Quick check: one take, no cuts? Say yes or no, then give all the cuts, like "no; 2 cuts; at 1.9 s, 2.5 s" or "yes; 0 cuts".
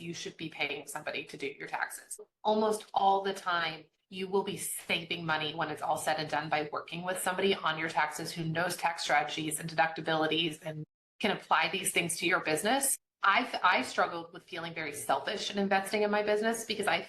no; 2 cuts; at 2.2 s, 13.0 s